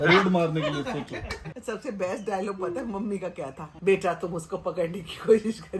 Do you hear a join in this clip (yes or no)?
yes